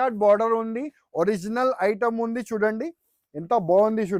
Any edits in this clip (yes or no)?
no